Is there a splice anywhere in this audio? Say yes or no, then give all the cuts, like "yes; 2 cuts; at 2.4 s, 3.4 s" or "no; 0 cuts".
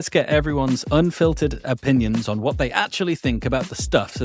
no; 0 cuts